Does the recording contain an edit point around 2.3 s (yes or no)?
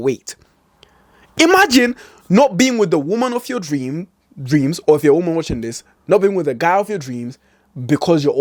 no